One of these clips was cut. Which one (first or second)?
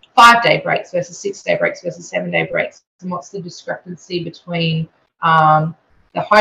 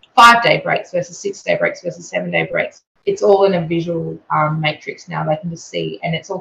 second